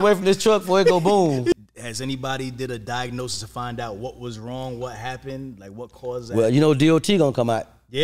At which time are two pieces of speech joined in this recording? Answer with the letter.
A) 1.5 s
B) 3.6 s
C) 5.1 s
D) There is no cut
A